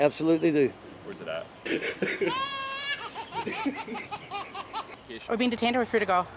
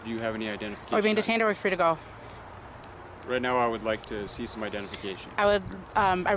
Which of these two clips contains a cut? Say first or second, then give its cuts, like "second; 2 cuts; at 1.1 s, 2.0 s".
first; 1 cut; at 5.1 s